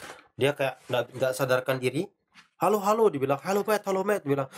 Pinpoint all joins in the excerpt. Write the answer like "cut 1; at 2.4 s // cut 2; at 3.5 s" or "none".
none